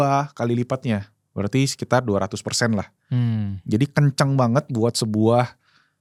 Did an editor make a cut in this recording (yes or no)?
no